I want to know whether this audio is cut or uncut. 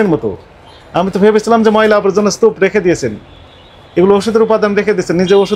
uncut